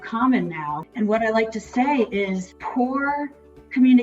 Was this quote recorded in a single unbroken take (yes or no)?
no